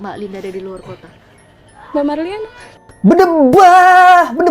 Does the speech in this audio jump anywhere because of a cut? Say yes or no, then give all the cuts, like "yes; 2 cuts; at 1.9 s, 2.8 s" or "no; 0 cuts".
no; 0 cuts